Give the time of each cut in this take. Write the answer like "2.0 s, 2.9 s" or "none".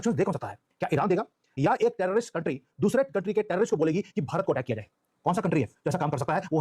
none